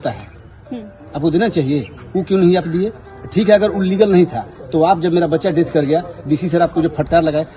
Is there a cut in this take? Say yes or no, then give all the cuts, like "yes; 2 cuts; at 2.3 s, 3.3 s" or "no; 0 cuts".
no; 0 cuts